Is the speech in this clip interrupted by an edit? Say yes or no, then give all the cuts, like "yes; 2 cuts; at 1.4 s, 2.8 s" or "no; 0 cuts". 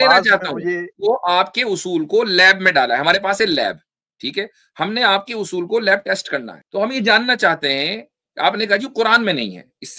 yes; 2 cuts; at 0.9 s, 6.6 s